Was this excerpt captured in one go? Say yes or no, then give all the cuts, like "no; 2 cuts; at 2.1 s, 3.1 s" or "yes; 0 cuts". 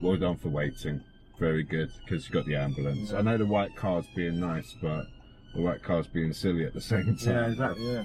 yes; 0 cuts